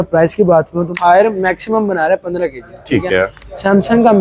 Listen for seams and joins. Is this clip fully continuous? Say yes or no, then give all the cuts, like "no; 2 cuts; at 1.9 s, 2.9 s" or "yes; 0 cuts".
no; 1 cut; at 0.9 s